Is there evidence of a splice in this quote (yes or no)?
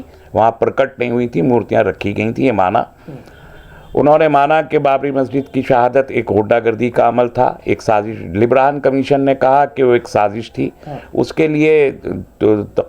no